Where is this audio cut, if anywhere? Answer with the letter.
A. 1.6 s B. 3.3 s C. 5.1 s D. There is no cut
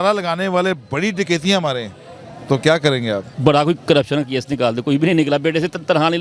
B